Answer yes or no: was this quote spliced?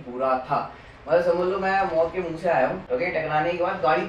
yes